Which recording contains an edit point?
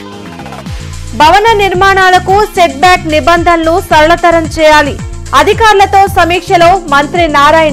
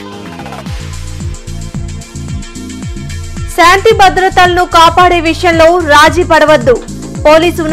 second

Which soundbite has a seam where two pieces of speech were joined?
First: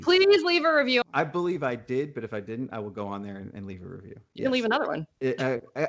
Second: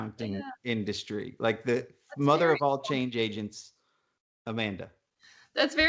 first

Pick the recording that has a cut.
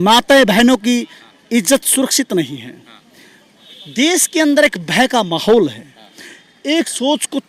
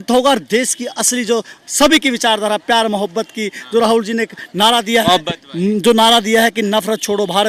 first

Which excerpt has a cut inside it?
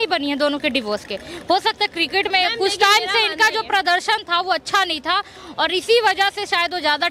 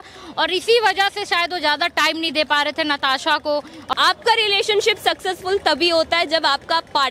second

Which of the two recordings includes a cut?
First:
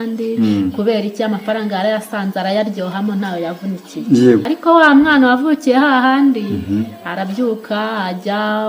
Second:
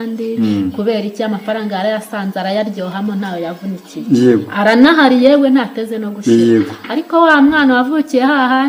first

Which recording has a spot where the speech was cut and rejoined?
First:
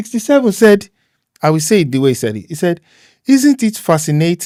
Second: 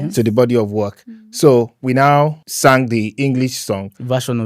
second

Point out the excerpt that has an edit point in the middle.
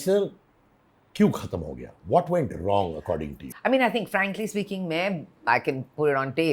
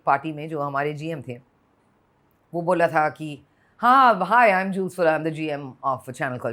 first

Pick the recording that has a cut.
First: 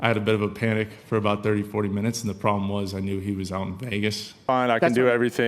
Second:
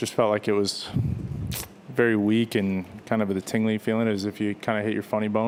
first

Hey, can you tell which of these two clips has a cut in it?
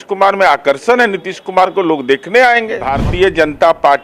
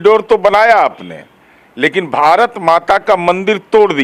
first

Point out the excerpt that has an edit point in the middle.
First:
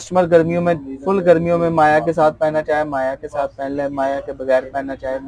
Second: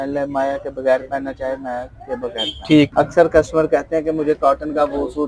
second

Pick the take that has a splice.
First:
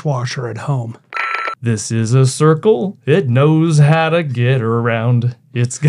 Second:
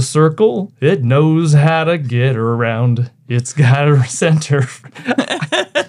first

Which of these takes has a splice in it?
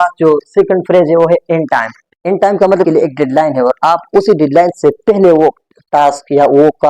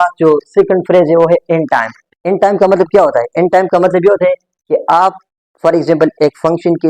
first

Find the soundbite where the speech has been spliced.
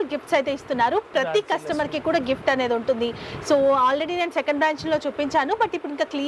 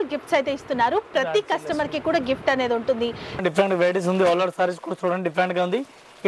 second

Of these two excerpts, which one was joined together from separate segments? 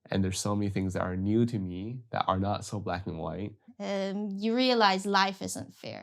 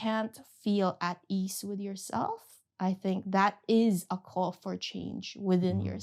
first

